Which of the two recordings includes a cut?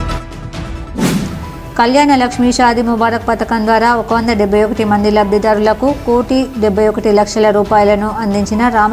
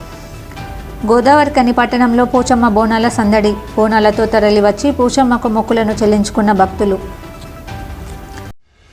first; 1 cut; at 1.2 s

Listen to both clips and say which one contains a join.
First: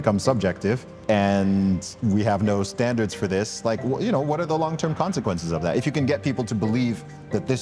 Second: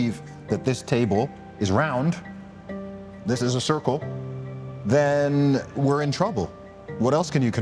first; 1 cut; at 0.9 s

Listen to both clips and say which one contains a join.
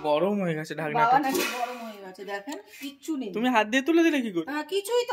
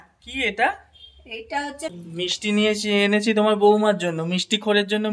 second; 1 cut; at 1.9 s

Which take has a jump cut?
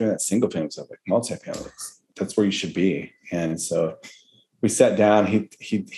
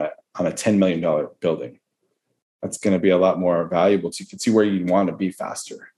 first; 1 cut; at 2.1 s

